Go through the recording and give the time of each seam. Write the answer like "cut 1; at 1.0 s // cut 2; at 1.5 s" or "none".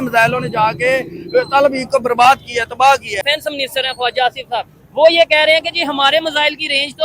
cut 1; at 3.2 s